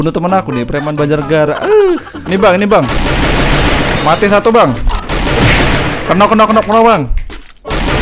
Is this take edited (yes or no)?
yes